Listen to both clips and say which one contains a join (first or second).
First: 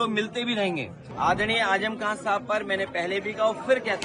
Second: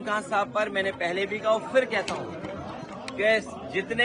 first